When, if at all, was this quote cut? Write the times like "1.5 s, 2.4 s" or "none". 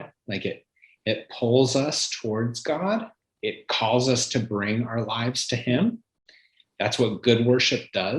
3.2 s